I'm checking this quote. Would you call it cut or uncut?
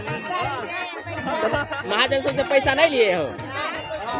uncut